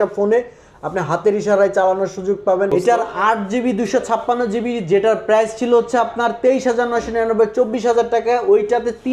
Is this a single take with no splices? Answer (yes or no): no